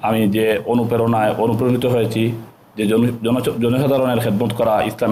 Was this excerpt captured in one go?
yes; 0 cuts

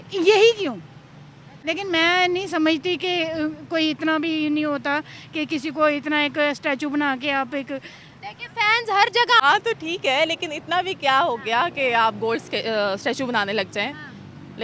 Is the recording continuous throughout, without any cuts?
no; 2 cuts; at 1.5 s, 9.4 s

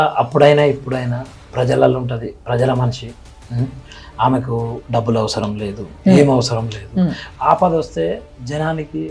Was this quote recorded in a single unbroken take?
no; 1 cut; at 7.2 s

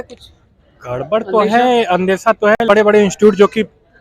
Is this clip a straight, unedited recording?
no; 1 cut; at 2.6 s

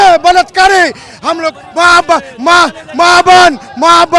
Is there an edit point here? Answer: no; 0 cuts

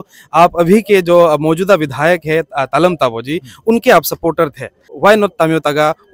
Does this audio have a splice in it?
yes; 1 cut; at 4.9 s

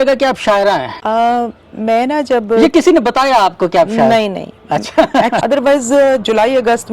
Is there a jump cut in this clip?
yes; 1 cut; at 5.4 s

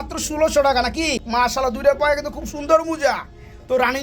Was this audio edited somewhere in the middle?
yes; 1 cut; at 1.2 s

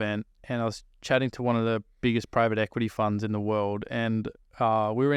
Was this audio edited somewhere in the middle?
no; 0 cuts

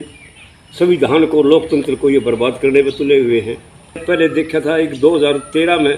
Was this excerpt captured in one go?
no; 1 cut; at 4.0 s

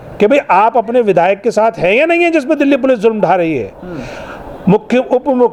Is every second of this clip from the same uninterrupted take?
yes; 0 cuts

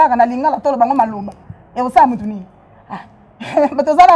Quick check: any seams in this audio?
no; 0 cuts

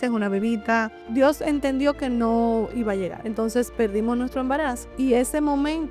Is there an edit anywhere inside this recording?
yes; 3 cuts; at 1.0 s, 3.2 s, 4.8 s

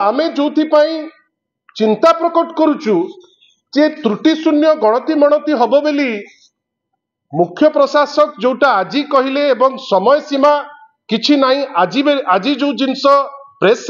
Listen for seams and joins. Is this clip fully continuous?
yes; 0 cuts

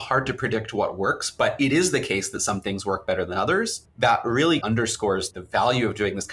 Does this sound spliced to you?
yes; 2 cuts; at 3.8 s, 4.8 s

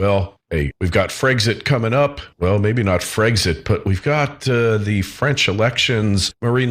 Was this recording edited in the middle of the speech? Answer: yes; 1 cut; at 4.8 s

